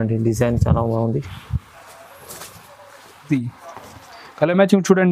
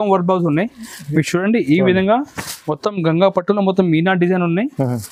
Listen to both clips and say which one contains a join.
first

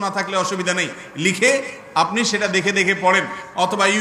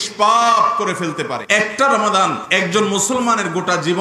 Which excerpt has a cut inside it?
second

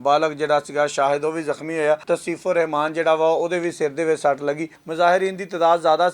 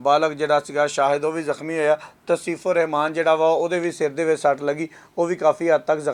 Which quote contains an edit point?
first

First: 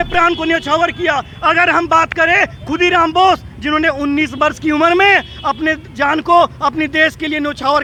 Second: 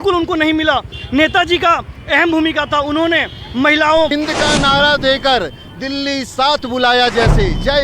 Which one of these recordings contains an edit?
second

